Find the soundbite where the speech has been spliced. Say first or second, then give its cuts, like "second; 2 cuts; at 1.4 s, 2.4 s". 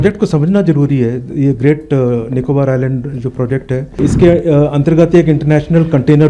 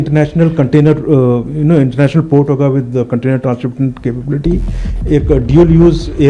first; 1 cut; at 3.9 s